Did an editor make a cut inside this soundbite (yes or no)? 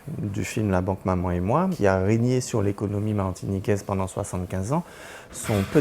yes